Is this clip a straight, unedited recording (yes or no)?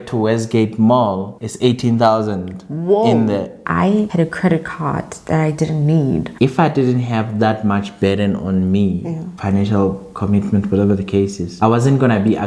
no